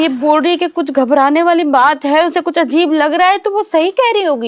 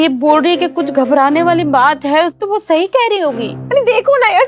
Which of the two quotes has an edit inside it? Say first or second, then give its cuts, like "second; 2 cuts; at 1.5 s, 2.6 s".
second; 2 cuts; at 2.4 s, 3.5 s